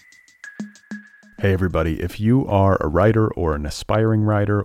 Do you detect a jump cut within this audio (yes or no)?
yes